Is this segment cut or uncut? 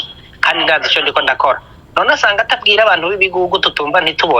uncut